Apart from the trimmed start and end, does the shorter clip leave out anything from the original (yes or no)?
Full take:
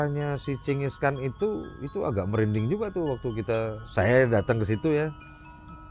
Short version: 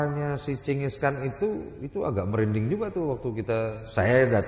no